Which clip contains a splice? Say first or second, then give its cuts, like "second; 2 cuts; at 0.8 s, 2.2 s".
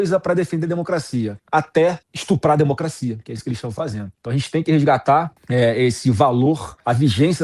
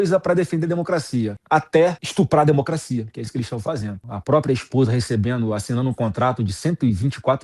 second; 2 cuts; at 1.8 s, 4.0 s